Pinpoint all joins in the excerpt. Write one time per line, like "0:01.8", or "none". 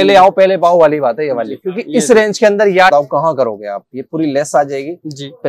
0:02.9